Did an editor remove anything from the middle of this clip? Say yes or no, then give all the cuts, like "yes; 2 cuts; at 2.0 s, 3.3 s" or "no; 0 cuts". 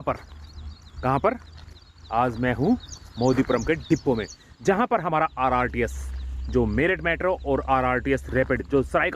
no; 0 cuts